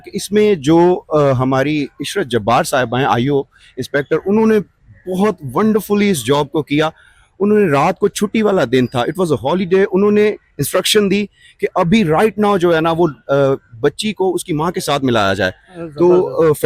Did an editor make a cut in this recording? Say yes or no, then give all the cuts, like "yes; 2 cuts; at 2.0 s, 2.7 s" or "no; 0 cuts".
no; 0 cuts